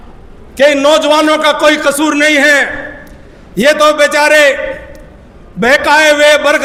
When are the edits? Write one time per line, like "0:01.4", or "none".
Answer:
none